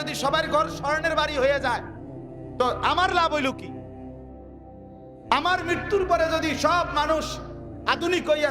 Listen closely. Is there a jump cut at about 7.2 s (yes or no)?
no